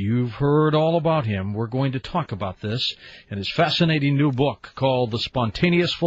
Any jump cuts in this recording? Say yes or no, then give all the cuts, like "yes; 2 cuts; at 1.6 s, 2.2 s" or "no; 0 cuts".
yes; 1 cut; at 0.9 s